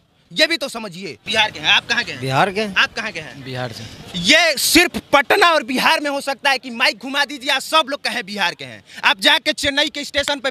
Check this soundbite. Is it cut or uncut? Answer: cut